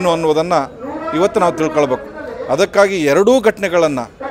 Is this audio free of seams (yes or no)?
yes